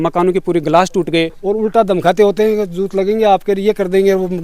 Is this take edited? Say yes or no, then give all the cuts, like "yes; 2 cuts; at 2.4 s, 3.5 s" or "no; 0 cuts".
yes; 1 cut; at 1.4 s